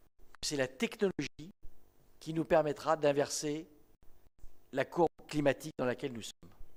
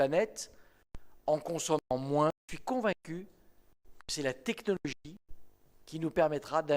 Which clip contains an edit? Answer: second; 1 cut; at 2.5 s

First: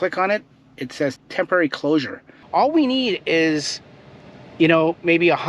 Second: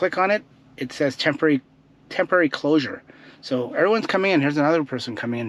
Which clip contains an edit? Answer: first; 2 cuts; at 1.2 s, 2.4 s

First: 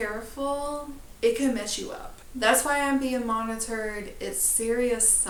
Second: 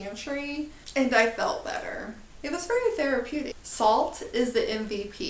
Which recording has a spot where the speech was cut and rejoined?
second; 2 cuts; at 2.2 s, 3.6 s

